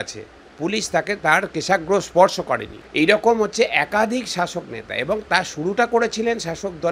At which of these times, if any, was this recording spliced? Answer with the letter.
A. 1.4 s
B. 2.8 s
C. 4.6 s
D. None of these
B